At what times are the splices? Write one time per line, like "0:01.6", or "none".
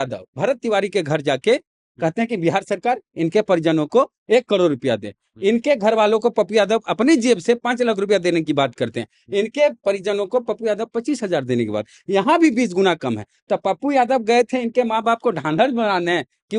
none